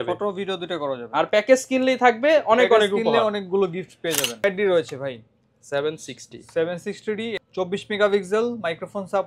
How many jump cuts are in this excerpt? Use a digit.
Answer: 2